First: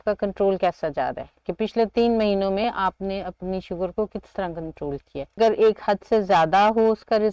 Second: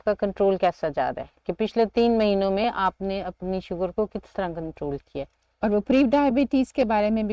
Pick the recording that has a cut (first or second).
first